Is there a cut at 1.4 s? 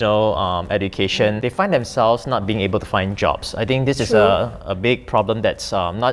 yes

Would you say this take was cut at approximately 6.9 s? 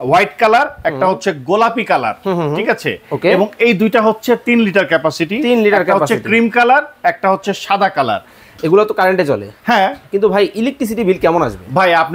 no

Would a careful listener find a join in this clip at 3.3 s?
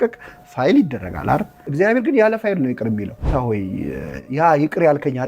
yes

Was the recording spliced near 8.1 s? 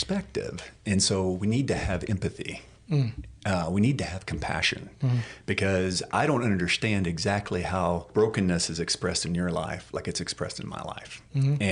yes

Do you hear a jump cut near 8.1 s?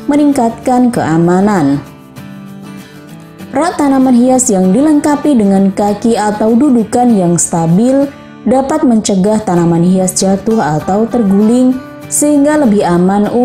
no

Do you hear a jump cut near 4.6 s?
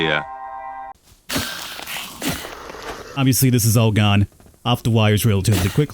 no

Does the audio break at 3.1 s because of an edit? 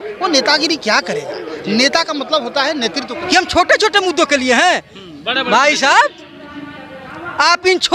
yes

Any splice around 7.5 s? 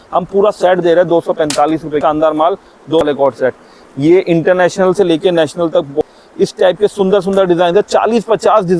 no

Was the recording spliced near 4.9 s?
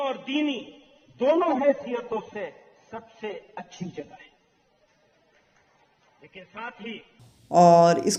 no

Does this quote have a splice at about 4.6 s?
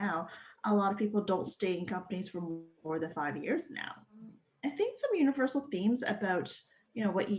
yes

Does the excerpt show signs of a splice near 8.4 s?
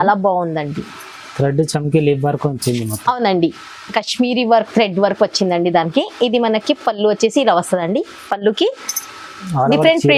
no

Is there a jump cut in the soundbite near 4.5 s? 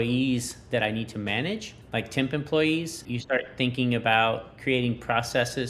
no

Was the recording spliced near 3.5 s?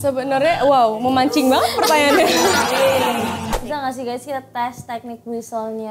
yes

